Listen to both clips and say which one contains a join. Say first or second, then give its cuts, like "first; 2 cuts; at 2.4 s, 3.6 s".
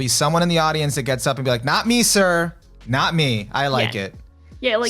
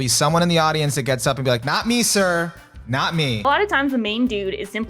second; 1 cut; at 3.4 s